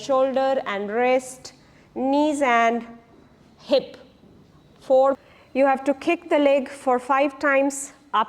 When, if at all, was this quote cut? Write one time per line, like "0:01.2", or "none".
0:05.2